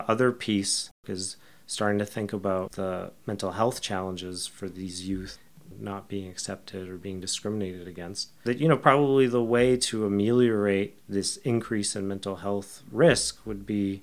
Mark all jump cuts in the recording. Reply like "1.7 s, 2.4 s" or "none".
1.0 s, 2.7 s, 5.5 s